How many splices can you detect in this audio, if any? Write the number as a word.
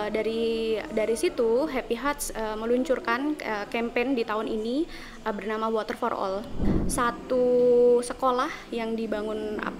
one